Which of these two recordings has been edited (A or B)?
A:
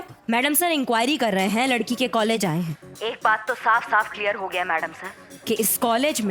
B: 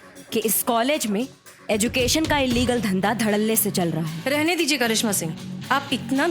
B